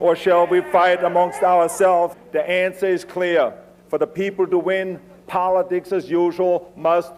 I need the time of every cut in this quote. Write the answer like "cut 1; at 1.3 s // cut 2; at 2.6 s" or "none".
none